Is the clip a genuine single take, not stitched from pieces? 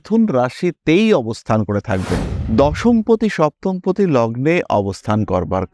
no; 1 cut; at 2.3 s

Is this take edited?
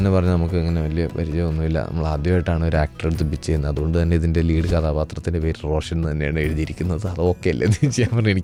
no; 0 cuts

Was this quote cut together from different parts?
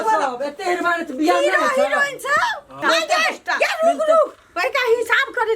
yes; 1 cut; at 2.7 s

